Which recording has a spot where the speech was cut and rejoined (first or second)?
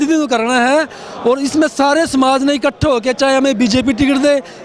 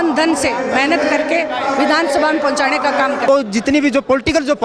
second